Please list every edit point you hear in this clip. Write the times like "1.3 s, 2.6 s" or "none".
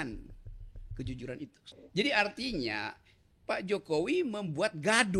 1.6 s